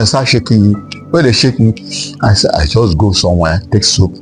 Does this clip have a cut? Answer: no; 0 cuts

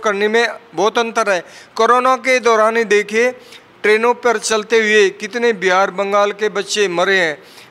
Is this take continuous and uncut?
yes; 0 cuts

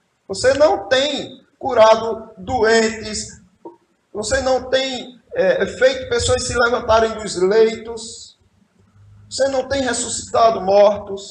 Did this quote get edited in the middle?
no; 0 cuts

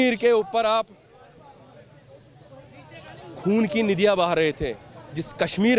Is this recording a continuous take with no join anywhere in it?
yes; 0 cuts

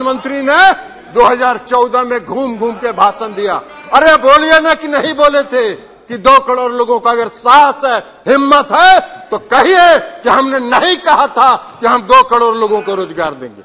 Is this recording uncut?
yes; 0 cuts

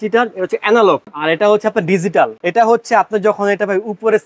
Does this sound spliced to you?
yes; 2 cuts; at 1.2 s, 2.4 s

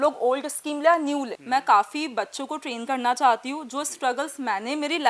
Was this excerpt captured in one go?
no; 1 cut; at 1.3 s

